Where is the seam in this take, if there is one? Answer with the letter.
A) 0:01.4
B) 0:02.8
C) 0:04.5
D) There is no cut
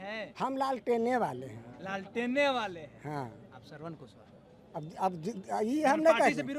D